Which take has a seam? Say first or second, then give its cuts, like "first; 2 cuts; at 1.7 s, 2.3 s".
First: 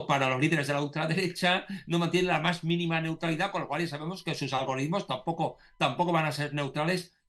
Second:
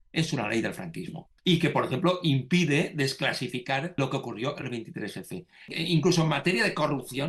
second; 3 cuts; at 1.2 s, 4.0 s, 5.7 s